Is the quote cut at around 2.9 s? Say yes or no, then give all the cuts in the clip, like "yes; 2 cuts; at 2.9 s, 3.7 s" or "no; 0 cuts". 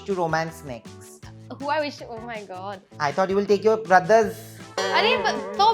yes; 1 cut; at 2.9 s